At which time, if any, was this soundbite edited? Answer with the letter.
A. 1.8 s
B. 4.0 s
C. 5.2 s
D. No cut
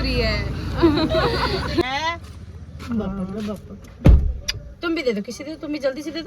A